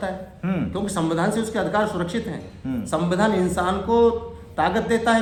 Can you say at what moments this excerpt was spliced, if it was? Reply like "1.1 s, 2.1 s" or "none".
none